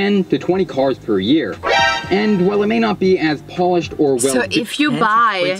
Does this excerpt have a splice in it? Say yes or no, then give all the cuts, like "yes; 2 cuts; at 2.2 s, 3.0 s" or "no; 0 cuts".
no; 0 cuts